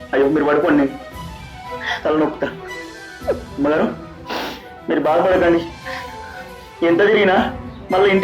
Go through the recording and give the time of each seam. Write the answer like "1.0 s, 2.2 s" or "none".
none